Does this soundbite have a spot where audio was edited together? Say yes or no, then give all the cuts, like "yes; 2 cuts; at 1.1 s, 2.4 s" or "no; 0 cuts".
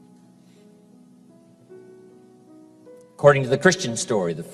yes; 1 cut; at 1.5 s